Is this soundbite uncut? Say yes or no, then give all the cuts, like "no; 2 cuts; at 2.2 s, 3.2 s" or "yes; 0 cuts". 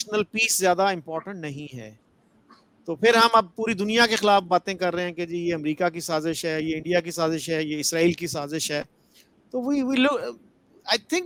yes; 0 cuts